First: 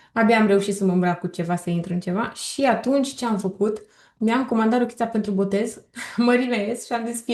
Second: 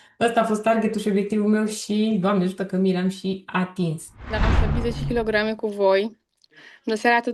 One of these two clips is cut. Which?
second; 1 cut; at 4.5 s

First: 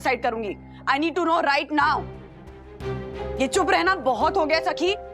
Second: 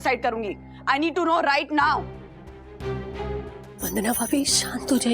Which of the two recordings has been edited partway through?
first; 1 cut; at 3.2 s

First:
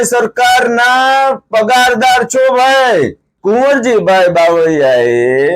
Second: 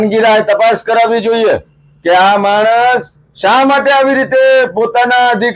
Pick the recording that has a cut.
first; 1 cut; at 3.2 s

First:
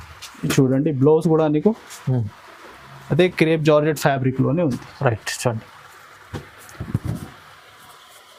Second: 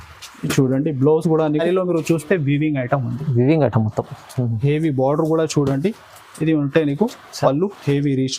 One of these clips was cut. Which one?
second; 1 cut; at 1.6 s

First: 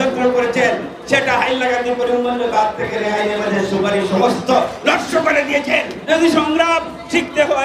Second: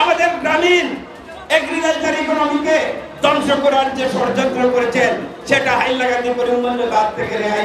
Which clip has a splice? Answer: first; 1 cut; at 6.0 s

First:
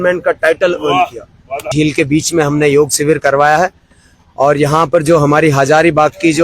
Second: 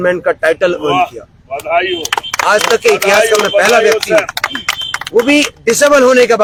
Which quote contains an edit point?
first; 1 cut; at 1.7 s

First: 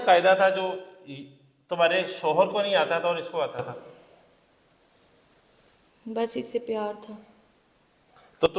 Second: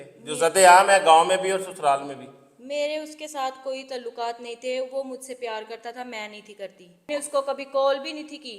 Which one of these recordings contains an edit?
second; 1 cut; at 7.1 s

